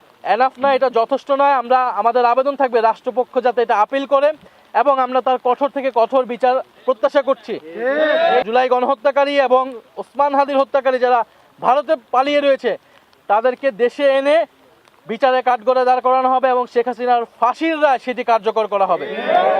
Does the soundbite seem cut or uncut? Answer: cut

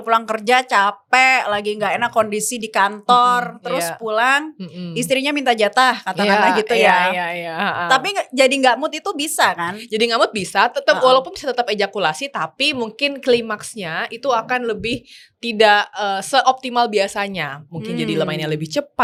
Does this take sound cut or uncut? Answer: uncut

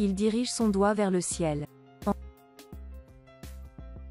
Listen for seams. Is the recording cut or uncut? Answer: cut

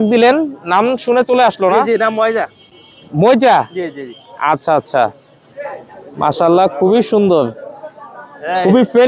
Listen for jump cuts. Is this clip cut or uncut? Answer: uncut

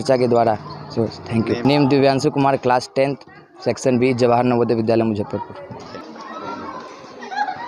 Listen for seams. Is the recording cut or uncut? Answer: uncut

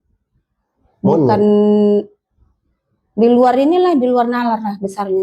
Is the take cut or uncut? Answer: uncut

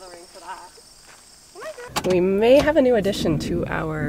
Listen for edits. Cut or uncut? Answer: cut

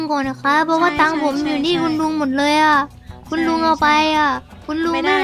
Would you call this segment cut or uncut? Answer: uncut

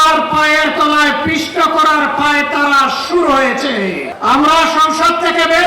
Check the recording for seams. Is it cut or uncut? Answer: cut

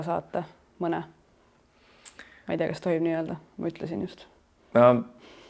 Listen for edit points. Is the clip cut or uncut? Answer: uncut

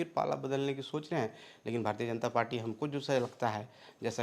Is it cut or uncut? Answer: uncut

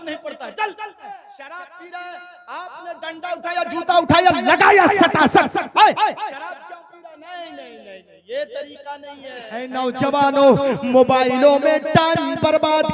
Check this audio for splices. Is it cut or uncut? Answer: cut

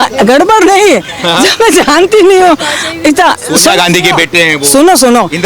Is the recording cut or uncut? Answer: uncut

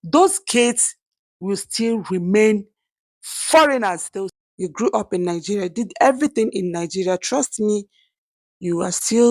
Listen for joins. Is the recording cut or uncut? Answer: cut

